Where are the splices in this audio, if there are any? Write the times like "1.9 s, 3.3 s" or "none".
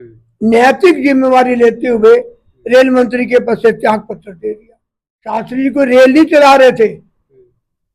5.4 s